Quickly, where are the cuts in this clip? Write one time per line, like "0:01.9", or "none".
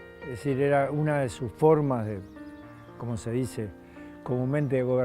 none